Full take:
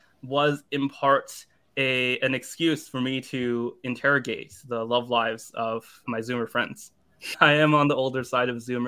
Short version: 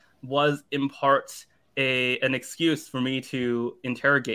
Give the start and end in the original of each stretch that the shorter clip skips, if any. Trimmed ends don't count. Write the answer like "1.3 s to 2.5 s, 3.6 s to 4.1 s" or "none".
none